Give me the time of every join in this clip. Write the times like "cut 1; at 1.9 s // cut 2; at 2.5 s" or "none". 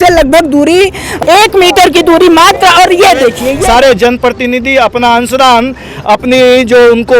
cut 1; at 1.1 s // cut 2; at 3.6 s